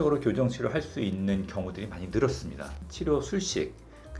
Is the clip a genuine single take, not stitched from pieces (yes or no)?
no